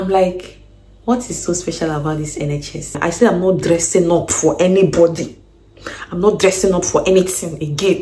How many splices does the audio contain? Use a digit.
1